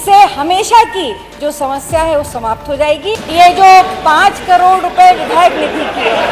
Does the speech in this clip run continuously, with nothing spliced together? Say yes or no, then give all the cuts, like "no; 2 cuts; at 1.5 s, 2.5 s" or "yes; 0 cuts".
no; 1 cut; at 3.2 s